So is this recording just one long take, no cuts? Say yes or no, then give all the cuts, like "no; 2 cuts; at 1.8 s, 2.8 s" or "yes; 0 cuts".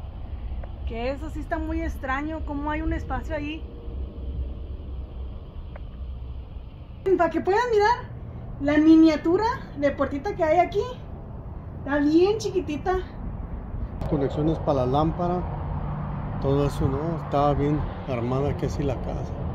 no; 2 cuts; at 7.0 s, 14.1 s